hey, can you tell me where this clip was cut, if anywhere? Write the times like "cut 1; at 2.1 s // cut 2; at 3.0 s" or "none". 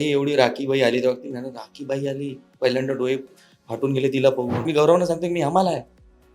cut 1; at 4.6 s